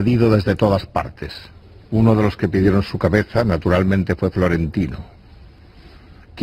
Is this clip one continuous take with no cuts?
yes; 0 cuts

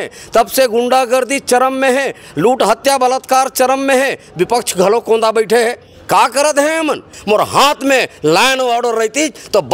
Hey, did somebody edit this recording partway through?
yes; 1 cut; at 7.1 s

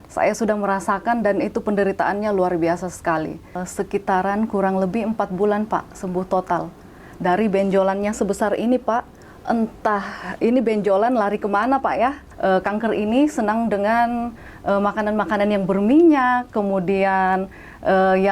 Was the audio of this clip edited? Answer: yes; 2 cuts; at 3.6 s, 12.3 s

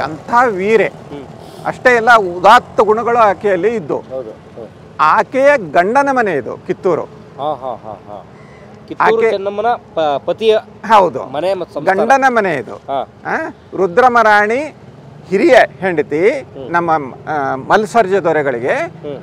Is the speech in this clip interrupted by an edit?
no; 0 cuts

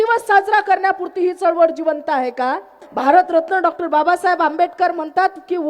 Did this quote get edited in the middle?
yes; 1 cut; at 2.8 s

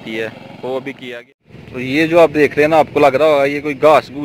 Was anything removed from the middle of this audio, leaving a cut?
yes; 1 cut; at 1.0 s

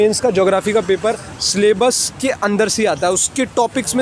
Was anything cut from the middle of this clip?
no; 0 cuts

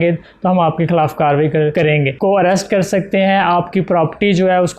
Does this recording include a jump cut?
yes; 1 cut; at 2.2 s

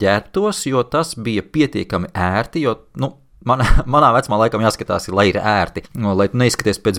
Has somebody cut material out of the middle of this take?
yes; 1 cut; at 5.8 s

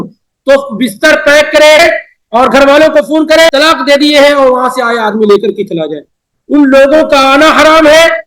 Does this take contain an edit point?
yes; 2 cuts; at 1.8 s, 3.5 s

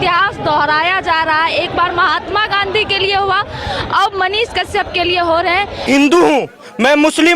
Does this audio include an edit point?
yes; 1 cut; at 5.8 s

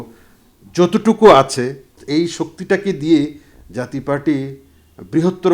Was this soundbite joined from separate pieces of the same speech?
yes; 1 cut; at 2.0 s

